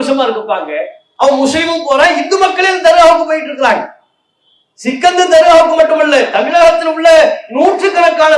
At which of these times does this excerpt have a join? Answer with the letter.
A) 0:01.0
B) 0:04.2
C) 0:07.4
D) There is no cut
A